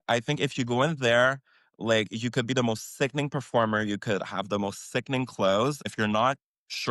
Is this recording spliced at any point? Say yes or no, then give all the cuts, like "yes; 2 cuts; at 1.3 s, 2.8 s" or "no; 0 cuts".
yes; 1 cut; at 5.8 s